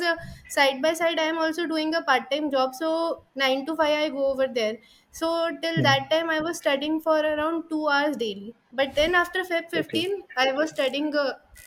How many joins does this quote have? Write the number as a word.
zero